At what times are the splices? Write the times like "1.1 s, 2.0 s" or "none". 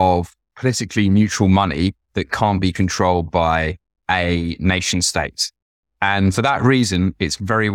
3.9 s